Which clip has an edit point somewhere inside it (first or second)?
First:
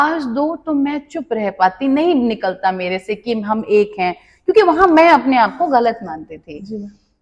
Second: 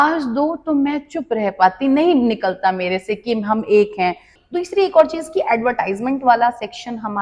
second